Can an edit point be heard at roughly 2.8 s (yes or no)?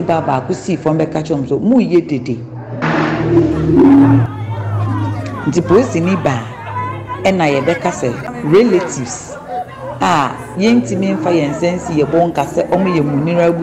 yes